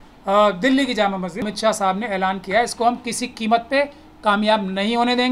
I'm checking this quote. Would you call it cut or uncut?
cut